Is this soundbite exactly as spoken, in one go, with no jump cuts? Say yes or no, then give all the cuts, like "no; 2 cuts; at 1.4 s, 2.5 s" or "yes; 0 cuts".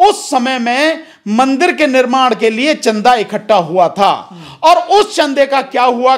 yes; 0 cuts